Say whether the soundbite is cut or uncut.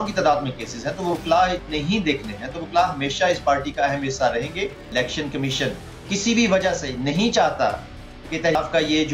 cut